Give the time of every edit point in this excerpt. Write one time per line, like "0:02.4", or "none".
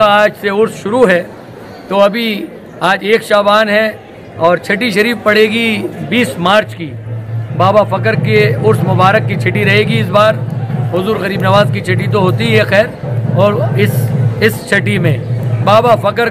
none